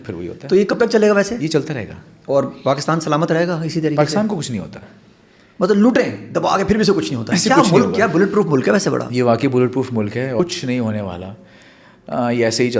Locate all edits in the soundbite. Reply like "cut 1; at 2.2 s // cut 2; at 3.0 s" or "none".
cut 1; at 10.4 s